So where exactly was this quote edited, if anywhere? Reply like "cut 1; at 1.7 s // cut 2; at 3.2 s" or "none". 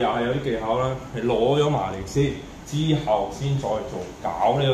none